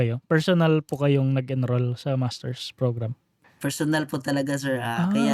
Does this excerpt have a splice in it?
yes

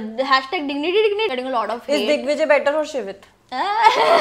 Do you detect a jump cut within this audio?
yes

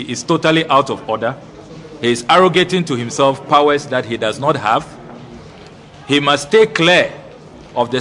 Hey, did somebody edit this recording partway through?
no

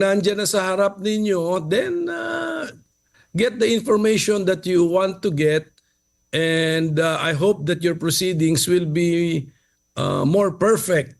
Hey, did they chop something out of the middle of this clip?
no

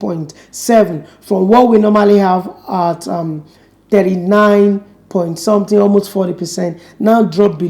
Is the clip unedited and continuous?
yes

